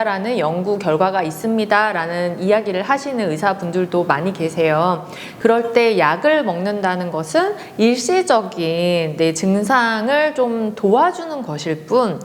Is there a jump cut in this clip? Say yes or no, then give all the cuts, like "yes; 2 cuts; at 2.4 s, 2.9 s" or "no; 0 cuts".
yes; 1 cut; at 5.2 s